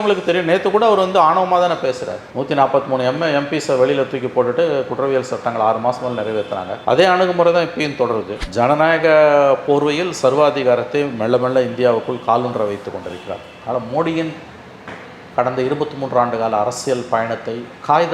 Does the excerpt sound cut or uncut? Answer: cut